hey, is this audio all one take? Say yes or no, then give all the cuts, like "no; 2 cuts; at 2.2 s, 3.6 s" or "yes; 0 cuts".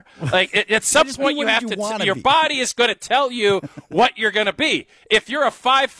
yes; 0 cuts